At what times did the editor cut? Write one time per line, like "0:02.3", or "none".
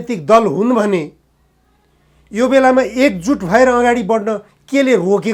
none